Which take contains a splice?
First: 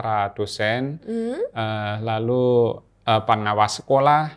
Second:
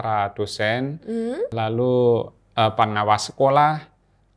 second; 1 cut; at 1.5 s

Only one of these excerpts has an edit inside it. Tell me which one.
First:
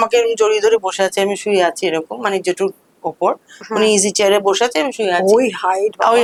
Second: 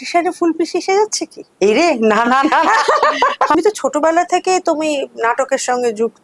second; 1 cut; at 3.6 s

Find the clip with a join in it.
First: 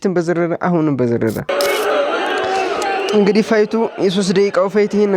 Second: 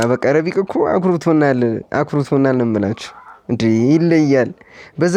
first; 1 cut; at 1.5 s

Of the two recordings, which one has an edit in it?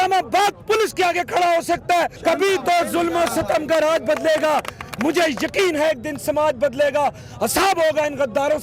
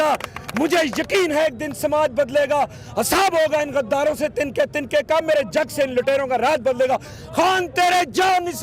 first; 1 cut; at 2.1 s

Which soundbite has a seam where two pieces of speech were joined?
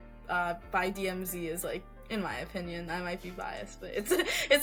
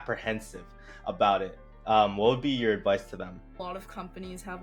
second; 1 cut; at 3.6 s

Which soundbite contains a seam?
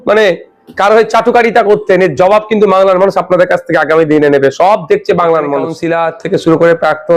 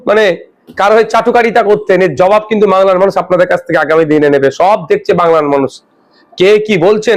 first; 1 cut; at 5.8 s

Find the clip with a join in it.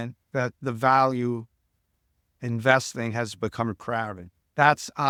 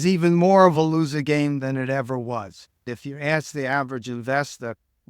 second; 1 cut; at 2.9 s

